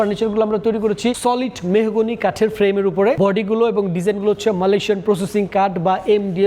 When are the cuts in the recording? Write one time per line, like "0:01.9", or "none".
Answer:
0:01.2
0:03.2